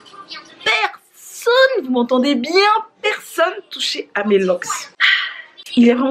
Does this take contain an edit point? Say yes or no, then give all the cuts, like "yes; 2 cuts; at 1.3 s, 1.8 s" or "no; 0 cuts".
no; 0 cuts